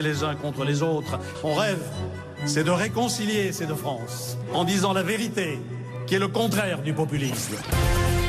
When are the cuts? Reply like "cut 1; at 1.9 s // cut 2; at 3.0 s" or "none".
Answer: cut 1; at 5.2 s